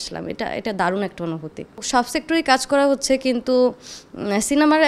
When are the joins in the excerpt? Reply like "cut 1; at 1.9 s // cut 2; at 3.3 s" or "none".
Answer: cut 1; at 1.8 s